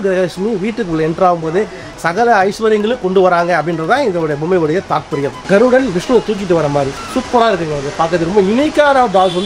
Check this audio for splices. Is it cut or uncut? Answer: cut